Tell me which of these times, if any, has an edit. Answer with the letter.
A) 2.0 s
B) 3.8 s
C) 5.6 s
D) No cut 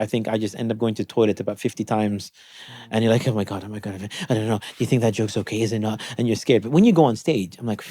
D